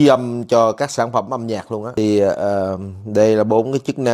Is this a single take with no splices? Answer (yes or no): yes